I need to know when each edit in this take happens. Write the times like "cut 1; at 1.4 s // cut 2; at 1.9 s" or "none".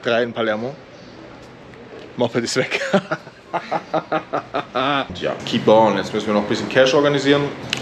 cut 1; at 5.1 s

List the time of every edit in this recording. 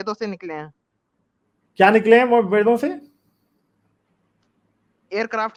none

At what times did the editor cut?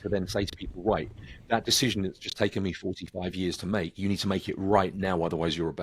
none

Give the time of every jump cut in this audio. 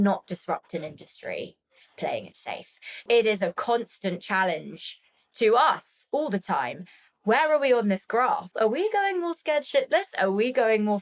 cut 1; at 3.0 s // cut 2; at 8.5 s

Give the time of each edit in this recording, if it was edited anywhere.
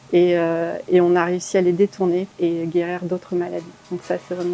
cut 1; at 2.3 s

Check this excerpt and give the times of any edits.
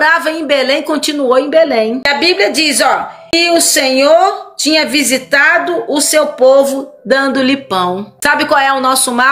cut 1; at 2.1 s // cut 2; at 3.3 s // cut 3; at 8.1 s

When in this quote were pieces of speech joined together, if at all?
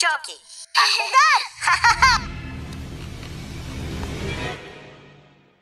cut 1; at 2.2 s

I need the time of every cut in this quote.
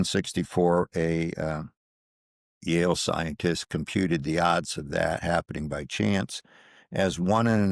none

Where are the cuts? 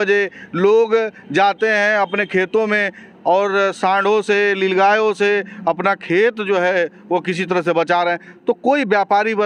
none

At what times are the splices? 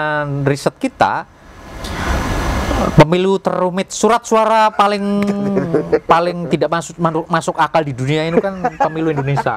none

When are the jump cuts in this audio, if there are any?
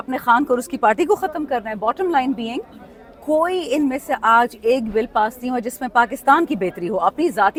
none

